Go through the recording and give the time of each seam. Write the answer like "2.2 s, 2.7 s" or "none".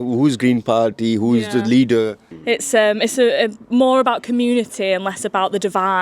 2.3 s